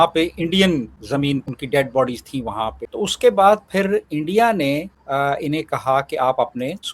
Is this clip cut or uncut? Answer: cut